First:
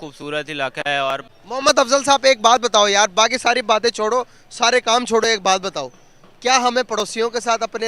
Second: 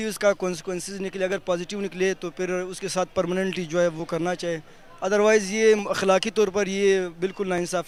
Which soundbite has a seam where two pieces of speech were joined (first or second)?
first